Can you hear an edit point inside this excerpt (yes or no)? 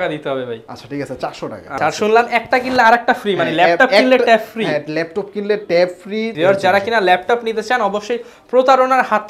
yes